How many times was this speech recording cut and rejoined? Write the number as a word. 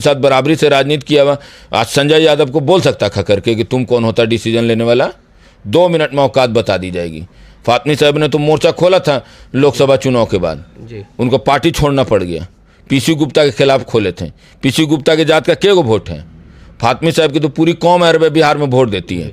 zero